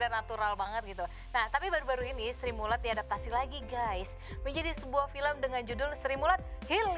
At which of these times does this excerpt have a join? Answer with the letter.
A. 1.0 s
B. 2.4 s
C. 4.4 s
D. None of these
D